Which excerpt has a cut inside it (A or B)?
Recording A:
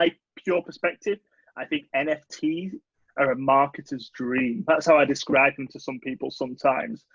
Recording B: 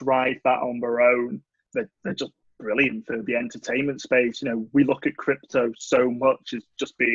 B